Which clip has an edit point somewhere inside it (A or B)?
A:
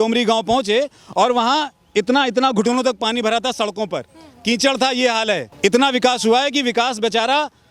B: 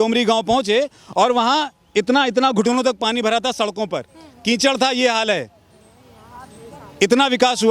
A